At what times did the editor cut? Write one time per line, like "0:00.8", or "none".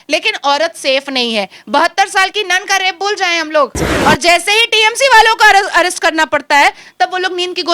0:03.9